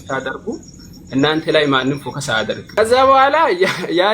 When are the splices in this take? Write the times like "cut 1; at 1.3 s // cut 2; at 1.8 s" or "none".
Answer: cut 1; at 2.6 s